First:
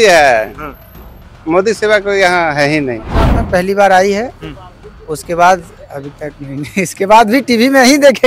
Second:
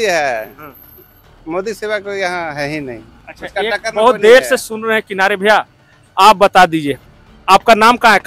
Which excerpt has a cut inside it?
first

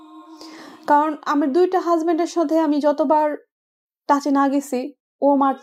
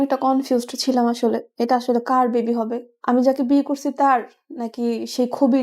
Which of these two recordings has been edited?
second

